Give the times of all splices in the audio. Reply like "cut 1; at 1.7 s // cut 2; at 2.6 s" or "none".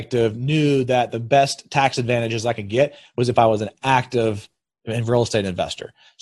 none